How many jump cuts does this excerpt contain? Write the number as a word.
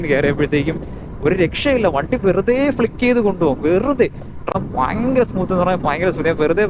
one